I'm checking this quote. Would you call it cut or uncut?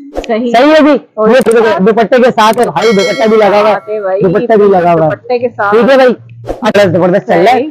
cut